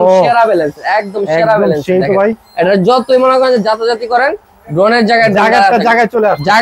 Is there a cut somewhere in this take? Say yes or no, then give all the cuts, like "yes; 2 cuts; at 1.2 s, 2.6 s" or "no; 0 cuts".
no; 0 cuts